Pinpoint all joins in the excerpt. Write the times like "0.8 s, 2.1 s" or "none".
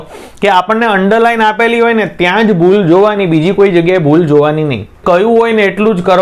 5.0 s